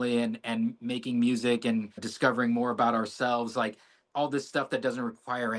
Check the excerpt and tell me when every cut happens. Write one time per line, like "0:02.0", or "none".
0:02.1